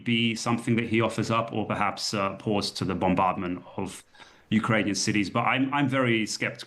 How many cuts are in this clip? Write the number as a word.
zero